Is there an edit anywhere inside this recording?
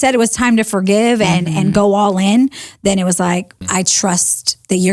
yes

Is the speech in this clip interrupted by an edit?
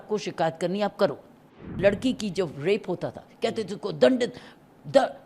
yes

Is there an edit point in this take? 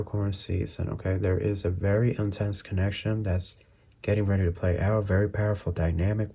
no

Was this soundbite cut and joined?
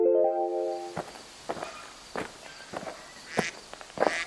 yes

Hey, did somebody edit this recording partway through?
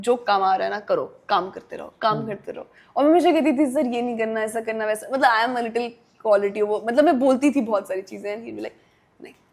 no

